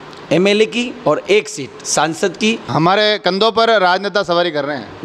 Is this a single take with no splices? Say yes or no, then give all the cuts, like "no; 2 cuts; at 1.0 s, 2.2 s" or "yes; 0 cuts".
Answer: no; 1 cut; at 2.7 s